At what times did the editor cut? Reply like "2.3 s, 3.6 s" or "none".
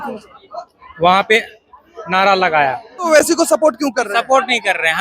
3.1 s